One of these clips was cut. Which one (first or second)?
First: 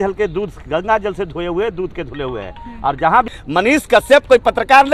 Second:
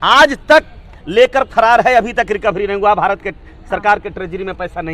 first